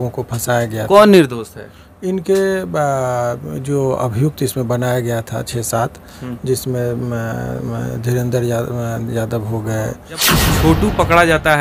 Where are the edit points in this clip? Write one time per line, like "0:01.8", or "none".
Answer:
0:10.3